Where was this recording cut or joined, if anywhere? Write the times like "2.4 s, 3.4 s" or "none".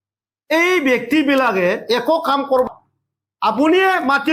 2.7 s